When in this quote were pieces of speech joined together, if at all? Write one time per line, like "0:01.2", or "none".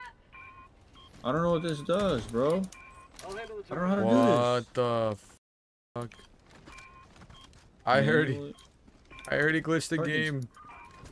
none